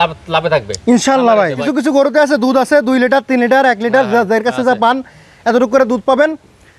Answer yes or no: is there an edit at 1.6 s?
yes